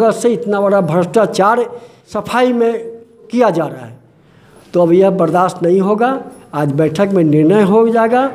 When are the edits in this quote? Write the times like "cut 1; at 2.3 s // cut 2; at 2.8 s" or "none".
cut 1; at 2.2 s // cut 2; at 3.2 s